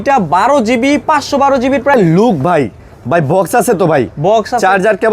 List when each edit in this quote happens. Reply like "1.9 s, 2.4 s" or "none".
1.9 s

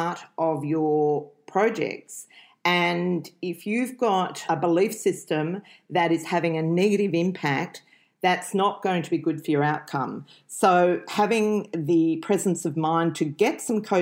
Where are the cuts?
none

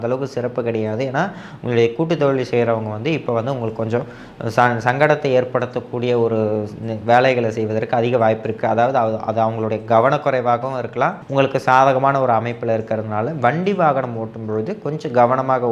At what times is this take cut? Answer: 11.2 s

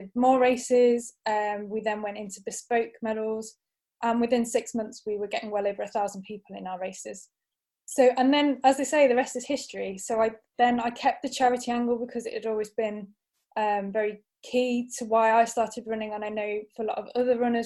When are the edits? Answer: none

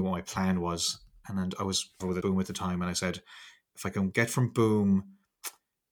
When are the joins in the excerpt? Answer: 2.2 s

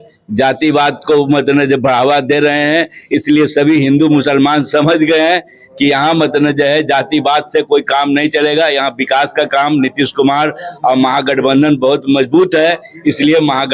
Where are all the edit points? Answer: none

